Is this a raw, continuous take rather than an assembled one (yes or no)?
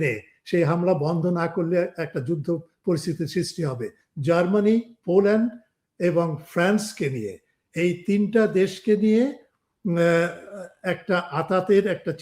no